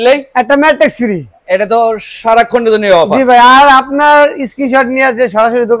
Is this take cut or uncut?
uncut